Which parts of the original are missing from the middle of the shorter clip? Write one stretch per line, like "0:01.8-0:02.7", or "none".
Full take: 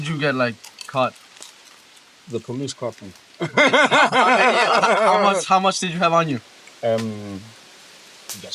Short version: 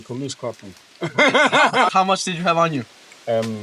0:04.3-0:05.4